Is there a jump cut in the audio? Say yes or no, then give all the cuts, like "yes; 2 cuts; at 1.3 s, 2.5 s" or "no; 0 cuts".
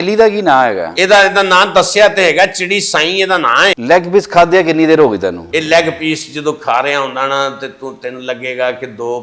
yes; 2 cuts; at 3.8 s, 5.4 s